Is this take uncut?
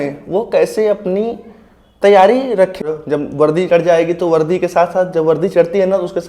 no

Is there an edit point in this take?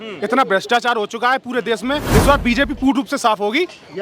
yes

